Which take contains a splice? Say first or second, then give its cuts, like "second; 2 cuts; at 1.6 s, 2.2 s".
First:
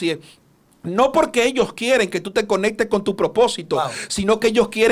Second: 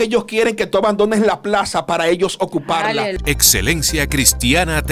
second; 1 cut; at 3.2 s